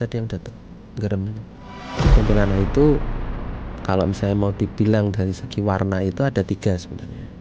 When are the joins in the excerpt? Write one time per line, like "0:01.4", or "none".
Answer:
0:02.1